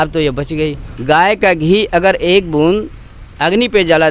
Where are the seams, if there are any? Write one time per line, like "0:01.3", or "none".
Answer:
0:00.9